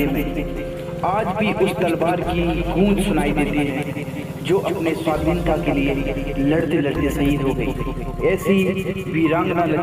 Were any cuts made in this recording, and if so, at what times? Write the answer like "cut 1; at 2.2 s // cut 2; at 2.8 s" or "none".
none